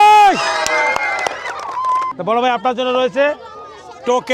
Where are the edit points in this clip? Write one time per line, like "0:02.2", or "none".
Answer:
0:02.1